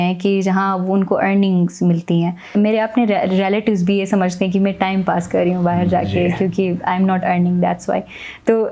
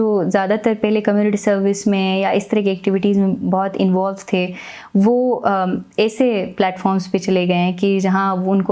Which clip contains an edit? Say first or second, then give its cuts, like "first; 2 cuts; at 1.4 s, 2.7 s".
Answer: first; 1 cut; at 2.5 s